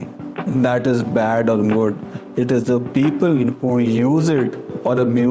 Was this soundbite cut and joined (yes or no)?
no